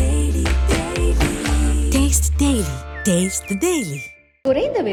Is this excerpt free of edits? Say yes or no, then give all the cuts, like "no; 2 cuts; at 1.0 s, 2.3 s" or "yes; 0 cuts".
yes; 0 cuts